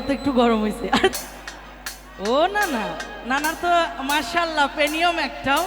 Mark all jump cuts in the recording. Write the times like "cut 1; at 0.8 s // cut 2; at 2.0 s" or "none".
cut 1; at 1.1 s